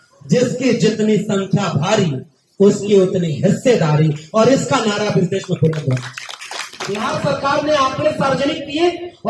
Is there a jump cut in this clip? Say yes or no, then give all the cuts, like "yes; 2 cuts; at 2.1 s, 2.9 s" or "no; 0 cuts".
yes; 1 cut; at 7.0 s